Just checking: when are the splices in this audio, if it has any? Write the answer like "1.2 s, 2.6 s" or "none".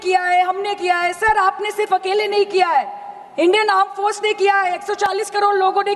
none